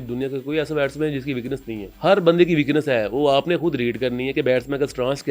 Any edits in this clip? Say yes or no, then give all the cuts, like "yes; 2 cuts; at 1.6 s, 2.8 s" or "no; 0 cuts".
yes; 1 cut; at 1.9 s